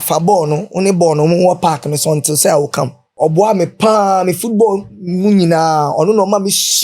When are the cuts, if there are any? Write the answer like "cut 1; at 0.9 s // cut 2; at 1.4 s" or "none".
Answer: cut 1; at 3.0 s

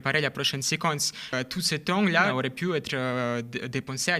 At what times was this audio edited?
cut 1; at 1.3 s // cut 2; at 2.3 s

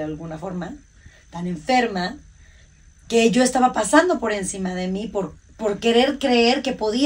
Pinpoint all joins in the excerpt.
none

